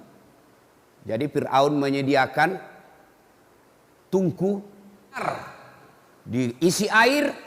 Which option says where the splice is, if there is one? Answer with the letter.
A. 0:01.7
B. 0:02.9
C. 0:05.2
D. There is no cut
C